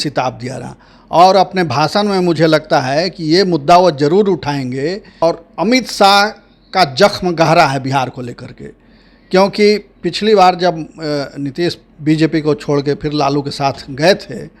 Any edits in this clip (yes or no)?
yes